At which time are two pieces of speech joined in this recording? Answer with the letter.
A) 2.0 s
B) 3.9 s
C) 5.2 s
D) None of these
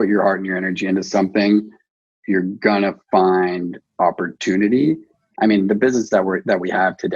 C